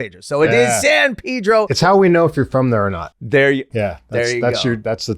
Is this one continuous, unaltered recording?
no; 1 cut; at 1.7 s

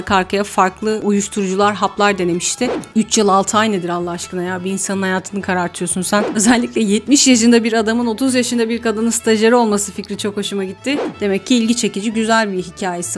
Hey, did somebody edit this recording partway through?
yes; 3 cuts; at 2.8 s, 6.3 s, 11.1 s

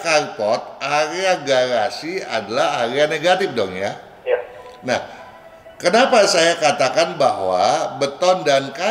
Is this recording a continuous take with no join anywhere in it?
yes; 0 cuts

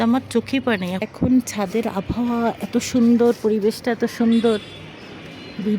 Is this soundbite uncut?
no; 1 cut; at 1.1 s

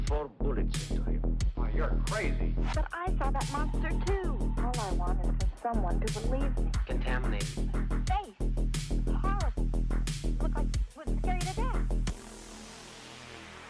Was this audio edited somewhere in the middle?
no; 0 cuts

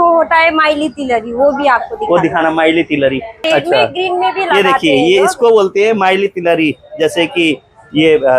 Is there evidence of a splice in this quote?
yes; 1 cut; at 3.4 s

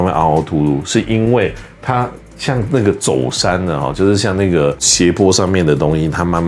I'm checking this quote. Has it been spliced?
no; 0 cuts

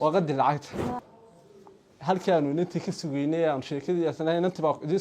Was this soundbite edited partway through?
yes; 1 cut; at 1.0 s

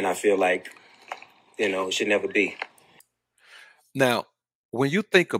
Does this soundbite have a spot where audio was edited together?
no; 0 cuts

